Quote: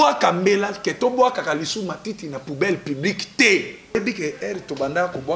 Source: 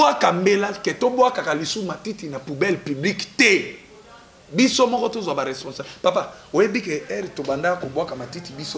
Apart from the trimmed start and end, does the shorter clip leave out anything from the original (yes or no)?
yes